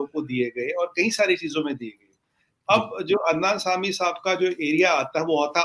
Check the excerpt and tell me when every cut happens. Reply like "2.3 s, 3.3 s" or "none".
none

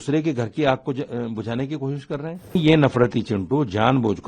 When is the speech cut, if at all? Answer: 2.6 s

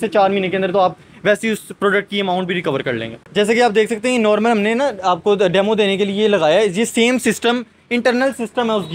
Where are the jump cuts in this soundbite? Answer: 3.3 s

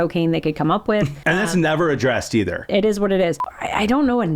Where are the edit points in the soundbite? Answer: 1.2 s, 2.7 s, 3.4 s

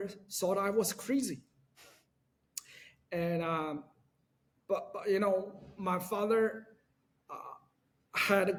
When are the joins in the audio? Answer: none

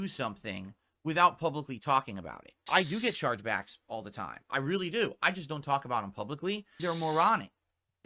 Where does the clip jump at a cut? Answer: 2.7 s, 6.7 s

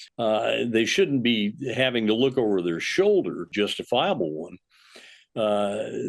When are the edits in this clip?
none

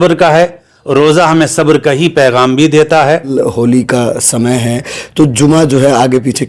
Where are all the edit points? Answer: 3.3 s

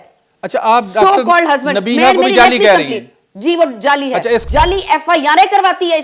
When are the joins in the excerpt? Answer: 4.5 s

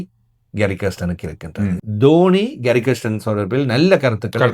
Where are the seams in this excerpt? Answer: 1.8 s

